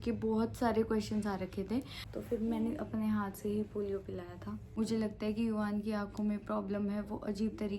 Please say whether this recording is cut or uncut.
cut